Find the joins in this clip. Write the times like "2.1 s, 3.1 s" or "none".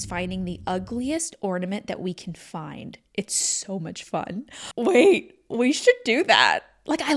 none